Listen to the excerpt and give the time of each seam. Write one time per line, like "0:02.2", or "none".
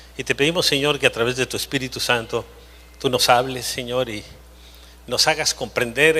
0:01.0